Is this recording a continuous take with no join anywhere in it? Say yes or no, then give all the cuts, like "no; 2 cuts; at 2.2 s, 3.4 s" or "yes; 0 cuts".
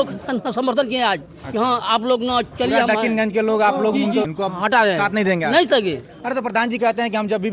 yes; 0 cuts